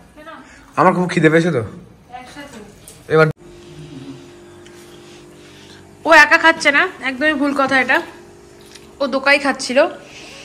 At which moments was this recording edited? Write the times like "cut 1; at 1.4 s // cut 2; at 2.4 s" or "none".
cut 1; at 3.3 s